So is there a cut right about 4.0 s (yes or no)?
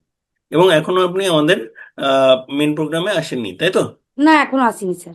yes